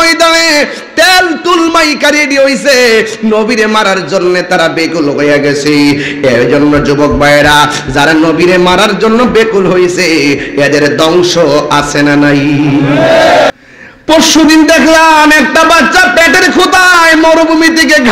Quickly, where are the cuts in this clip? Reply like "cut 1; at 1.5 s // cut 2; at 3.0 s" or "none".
cut 1; at 13.5 s